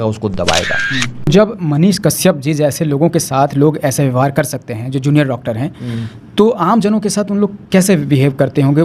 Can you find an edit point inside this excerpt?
yes; 1 cut; at 1.3 s

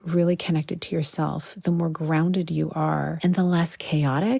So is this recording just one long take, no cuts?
no; 1 cut; at 3.1 s

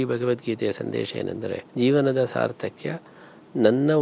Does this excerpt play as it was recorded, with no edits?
no; 1 cut; at 1.6 s

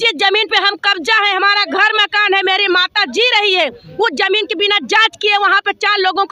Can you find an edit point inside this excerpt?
no; 0 cuts

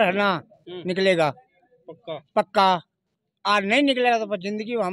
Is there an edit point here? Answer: no; 0 cuts

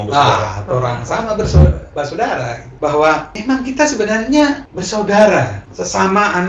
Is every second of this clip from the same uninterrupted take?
no; 1 cut; at 2.7 s

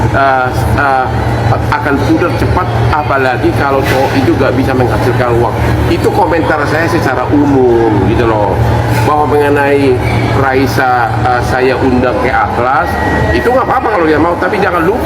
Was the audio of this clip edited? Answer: no; 0 cuts

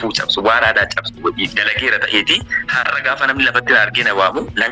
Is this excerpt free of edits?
yes; 0 cuts

